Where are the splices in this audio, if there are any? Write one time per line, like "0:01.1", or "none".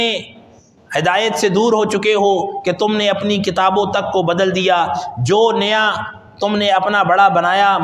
none